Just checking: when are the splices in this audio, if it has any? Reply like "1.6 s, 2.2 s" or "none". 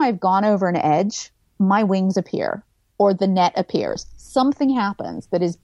none